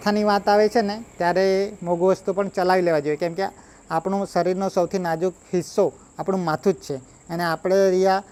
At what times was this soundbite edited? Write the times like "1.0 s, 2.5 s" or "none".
none